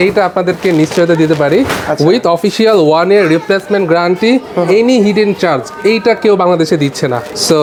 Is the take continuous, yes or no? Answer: yes